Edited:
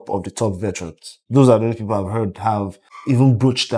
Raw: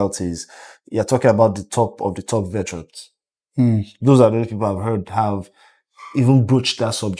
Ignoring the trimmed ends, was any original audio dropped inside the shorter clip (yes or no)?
yes